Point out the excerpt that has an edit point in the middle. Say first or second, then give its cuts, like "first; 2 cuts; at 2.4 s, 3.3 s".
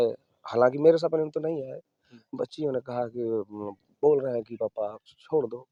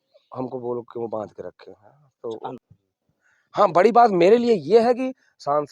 second; 1 cut; at 2.6 s